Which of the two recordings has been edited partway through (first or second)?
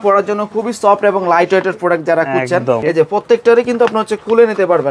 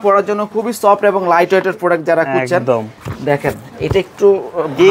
first